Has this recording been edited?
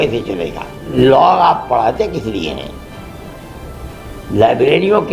yes; 1 cut; at 0.9 s

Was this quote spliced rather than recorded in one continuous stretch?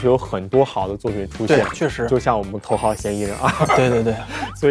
yes; 1 cut; at 2.5 s

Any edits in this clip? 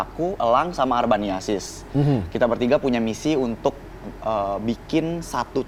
no; 0 cuts

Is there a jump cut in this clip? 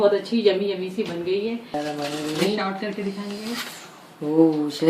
yes; 1 cut; at 1.7 s

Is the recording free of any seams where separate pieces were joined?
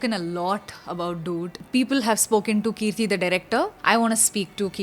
no; 2 cuts; at 1.6 s, 3.8 s

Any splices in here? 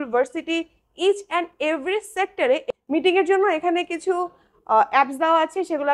yes; 1 cut; at 2.6 s

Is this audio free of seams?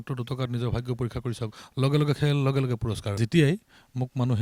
no; 1 cut; at 3.1 s

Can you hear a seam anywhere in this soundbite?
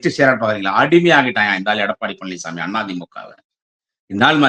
no; 0 cuts

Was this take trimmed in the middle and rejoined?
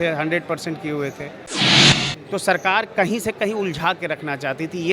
yes; 1 cut; at 1.8 s

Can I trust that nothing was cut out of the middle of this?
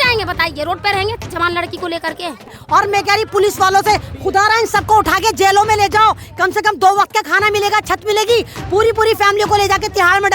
no; 1 cut; at 2.6 s

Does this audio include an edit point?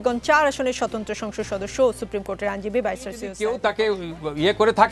yes; 1 cut; at 3.3 s

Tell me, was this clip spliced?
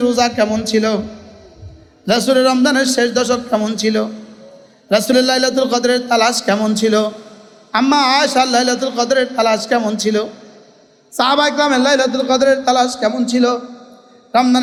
no; 0 cuts

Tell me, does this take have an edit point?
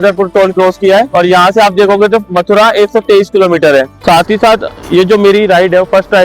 yes; 2 cuts; at 1.1 s, 4.0 s

